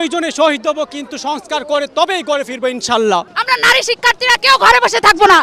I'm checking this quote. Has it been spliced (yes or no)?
yes